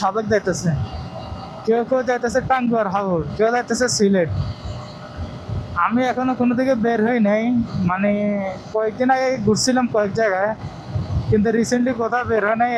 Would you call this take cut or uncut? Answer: uncut